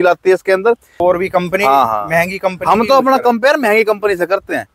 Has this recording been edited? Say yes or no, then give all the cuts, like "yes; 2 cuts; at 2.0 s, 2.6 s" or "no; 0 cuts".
yes; 1 cut; at 1.0 s